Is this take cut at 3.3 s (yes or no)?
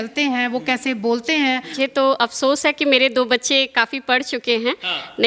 no